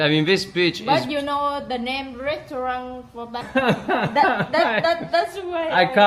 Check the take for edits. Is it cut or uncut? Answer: cut